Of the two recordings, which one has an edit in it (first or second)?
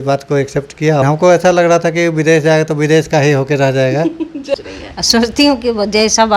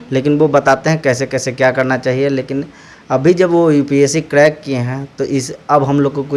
first